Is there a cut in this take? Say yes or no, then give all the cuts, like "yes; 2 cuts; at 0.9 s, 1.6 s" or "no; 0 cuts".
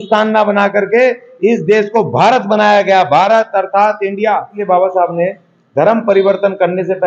yes; 1 cut; at 4.6 s